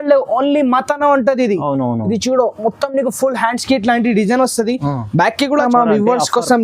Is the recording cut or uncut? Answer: cut